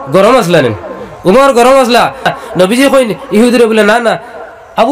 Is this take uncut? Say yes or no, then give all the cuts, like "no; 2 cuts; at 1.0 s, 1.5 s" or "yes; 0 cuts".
no; 1 cut; at 2.3 s